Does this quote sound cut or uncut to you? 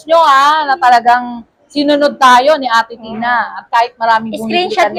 uncut